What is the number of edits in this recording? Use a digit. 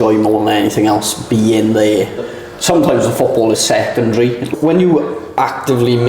2